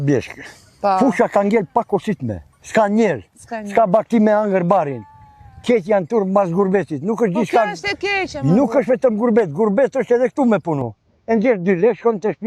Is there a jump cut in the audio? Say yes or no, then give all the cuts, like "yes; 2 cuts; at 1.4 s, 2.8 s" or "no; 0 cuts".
no; 0 cuts